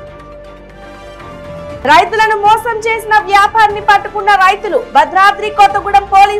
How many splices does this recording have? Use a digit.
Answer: 1